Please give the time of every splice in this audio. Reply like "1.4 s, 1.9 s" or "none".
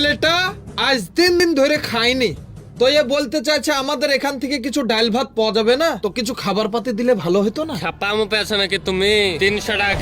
1.4 s